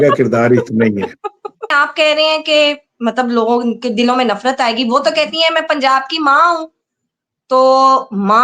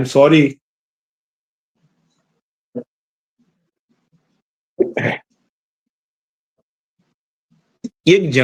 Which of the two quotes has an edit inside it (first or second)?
first